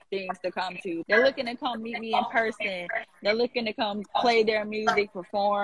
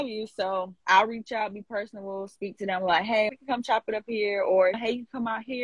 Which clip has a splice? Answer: first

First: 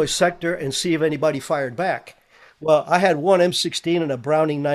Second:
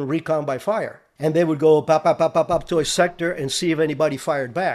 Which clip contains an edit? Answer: second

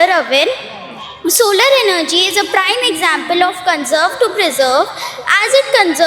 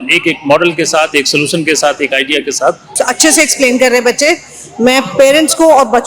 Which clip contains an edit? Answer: second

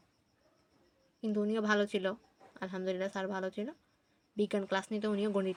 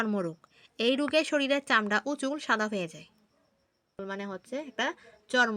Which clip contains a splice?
second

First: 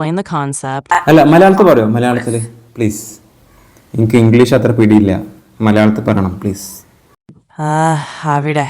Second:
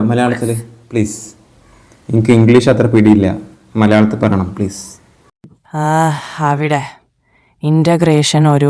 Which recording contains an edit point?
first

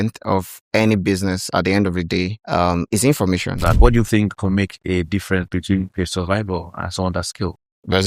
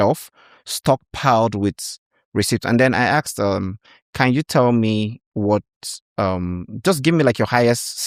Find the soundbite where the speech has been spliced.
first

